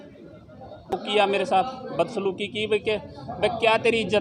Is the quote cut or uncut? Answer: cut